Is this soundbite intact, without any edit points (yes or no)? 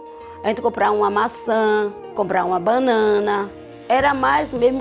no